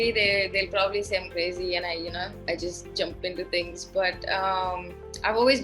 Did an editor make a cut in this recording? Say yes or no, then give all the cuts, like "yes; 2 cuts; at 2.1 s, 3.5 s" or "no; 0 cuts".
no; 0 cuts